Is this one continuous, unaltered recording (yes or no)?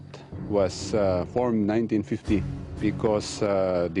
yes